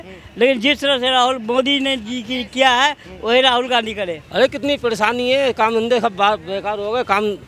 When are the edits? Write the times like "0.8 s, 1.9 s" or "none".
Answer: 4.2 s